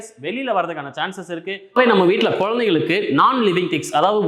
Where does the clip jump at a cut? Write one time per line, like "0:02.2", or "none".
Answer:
0:01.7

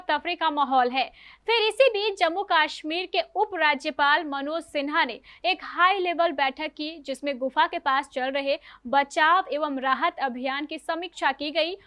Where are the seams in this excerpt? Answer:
none

